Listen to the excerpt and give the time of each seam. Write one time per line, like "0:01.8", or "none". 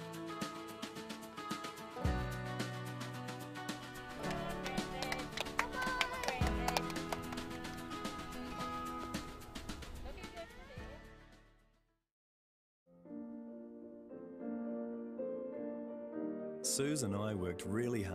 0:12.6